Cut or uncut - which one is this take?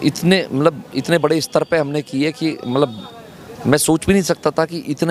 uncut